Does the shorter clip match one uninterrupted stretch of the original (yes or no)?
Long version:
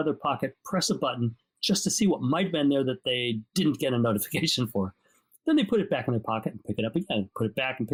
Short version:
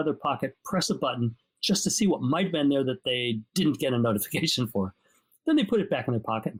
yes